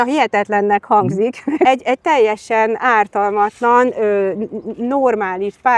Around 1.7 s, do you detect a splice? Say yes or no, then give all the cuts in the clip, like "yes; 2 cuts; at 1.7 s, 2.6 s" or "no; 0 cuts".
yes; 1 cut; at 1.7 s